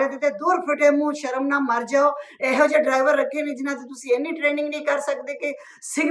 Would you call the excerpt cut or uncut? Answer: uncut